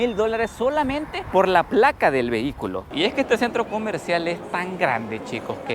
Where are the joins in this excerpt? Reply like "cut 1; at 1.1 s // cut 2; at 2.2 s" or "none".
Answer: cut 1; at 2.9 s